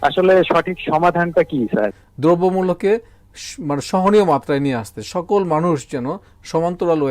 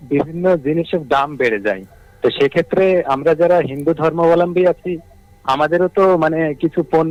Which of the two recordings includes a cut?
first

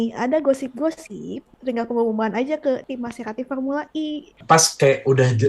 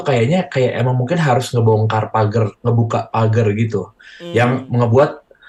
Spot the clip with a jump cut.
first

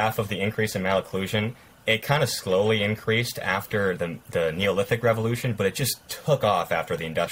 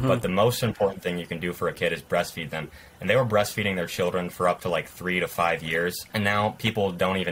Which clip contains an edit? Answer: second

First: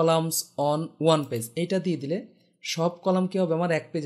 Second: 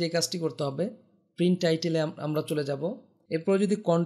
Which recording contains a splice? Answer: second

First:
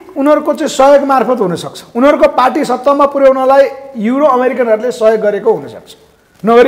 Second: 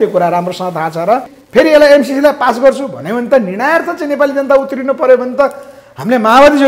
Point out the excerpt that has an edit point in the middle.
second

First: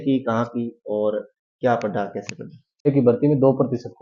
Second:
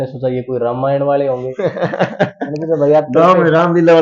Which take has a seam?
first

